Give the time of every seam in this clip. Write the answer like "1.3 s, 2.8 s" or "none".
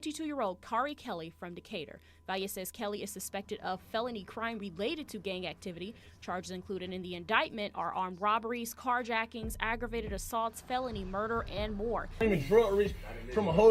12.2 s